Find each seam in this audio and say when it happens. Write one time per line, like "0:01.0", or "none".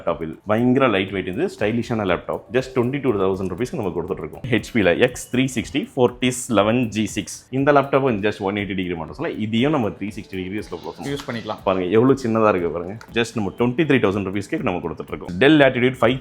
0:02.4
0:04.4
0:07.4
0:13.1
0:15.3